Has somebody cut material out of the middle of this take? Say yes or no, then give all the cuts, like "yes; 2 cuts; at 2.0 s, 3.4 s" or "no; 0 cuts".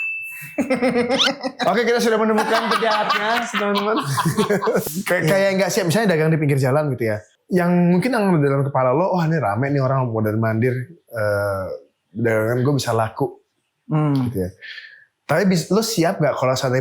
yes; 2 cuts; at 4.8 s, 7.3 s